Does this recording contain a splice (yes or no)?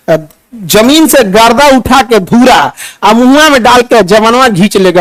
no